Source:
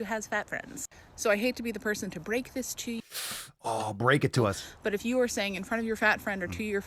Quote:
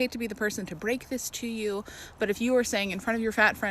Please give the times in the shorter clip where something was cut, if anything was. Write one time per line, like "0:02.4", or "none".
0:02.0